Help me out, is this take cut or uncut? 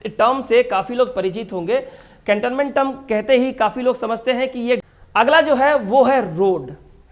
cut